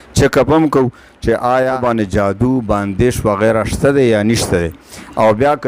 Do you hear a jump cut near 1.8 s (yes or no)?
yes